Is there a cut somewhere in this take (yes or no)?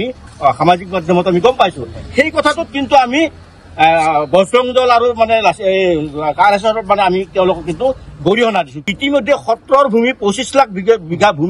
yes